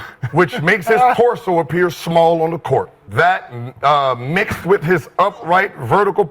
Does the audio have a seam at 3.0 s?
yes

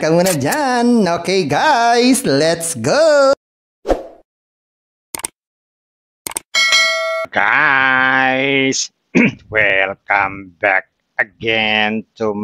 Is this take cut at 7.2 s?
yes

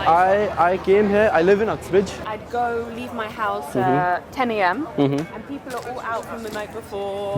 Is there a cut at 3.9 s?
no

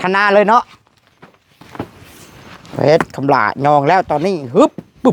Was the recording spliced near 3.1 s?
no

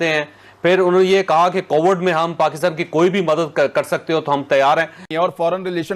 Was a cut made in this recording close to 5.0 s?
yes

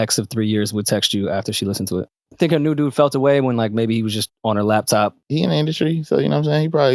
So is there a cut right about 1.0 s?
no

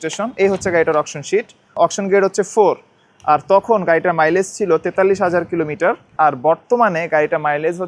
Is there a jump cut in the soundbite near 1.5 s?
no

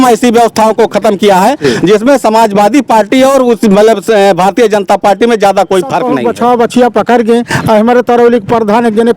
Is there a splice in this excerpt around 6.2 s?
yes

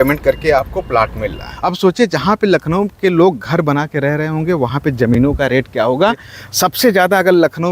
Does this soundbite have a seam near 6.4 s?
yes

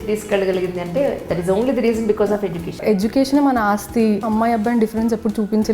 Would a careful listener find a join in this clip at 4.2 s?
yes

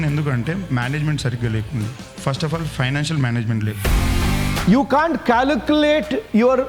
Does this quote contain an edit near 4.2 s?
yes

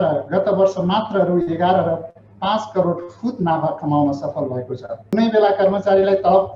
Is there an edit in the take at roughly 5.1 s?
yes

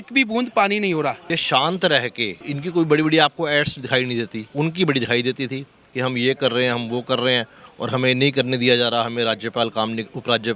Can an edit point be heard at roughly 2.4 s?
yes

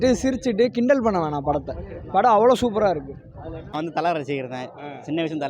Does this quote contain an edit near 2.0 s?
no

